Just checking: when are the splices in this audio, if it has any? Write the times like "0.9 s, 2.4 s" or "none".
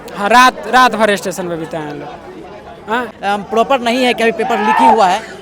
3.1 s